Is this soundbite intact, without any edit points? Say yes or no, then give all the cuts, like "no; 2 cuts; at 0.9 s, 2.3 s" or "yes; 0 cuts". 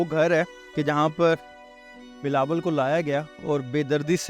yes; 0 cuts